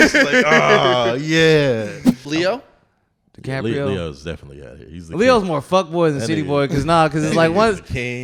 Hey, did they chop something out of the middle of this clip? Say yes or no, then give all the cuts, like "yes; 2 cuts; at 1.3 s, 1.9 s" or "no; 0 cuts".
yes; 1 cut; at 2.1 s